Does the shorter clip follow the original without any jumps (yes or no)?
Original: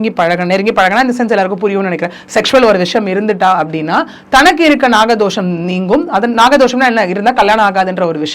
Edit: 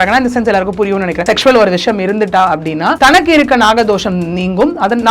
no